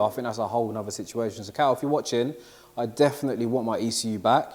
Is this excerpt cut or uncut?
uncut